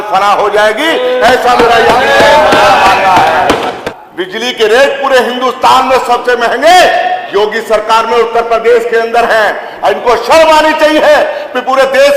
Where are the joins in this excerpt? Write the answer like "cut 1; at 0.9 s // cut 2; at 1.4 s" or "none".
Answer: cut 1; at 3.8 s